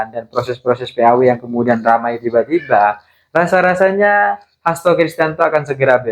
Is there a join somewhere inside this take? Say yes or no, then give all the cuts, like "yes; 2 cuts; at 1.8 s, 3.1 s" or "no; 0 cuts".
no; 0 cuts